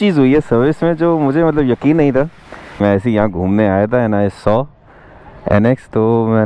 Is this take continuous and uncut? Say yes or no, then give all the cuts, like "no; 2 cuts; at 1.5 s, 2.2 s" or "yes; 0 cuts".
no; 1 cut; at 2.8 s